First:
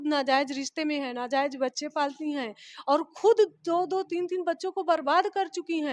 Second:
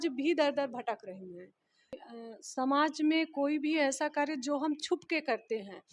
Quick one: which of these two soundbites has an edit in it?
second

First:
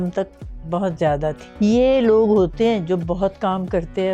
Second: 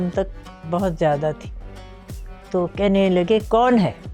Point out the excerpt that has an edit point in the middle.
first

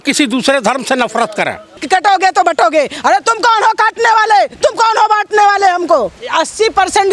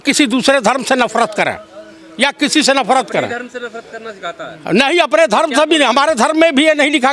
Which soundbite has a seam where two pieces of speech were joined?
first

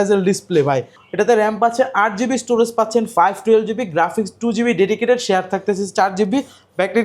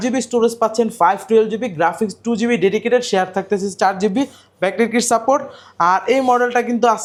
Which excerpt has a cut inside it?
first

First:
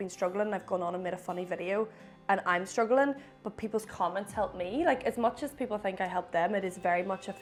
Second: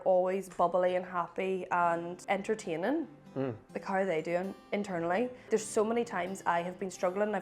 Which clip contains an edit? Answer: second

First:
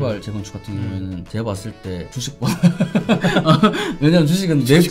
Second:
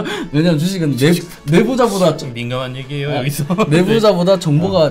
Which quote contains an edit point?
first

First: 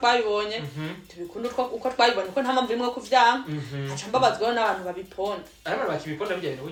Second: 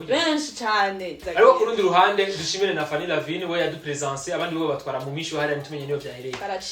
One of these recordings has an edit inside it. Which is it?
second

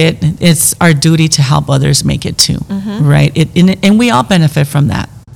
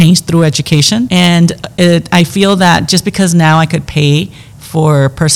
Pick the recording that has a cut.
second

